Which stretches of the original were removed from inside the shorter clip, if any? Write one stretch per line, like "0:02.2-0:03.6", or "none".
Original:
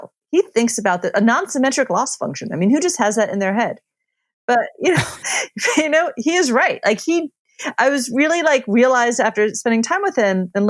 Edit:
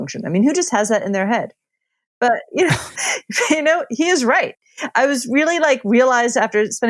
0:06.8-0:07.3